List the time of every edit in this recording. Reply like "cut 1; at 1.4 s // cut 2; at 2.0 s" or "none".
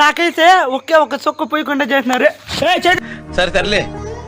cut 1; at 3.2 s